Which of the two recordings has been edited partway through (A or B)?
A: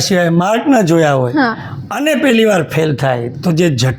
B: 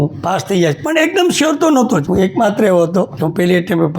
B